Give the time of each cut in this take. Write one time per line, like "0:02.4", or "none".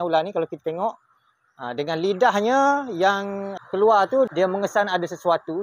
0:03.1
0:04.3